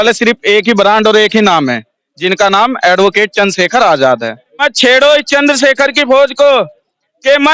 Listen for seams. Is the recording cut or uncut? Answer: cut